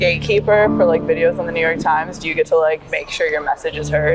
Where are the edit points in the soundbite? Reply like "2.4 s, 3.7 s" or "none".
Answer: 3.0 s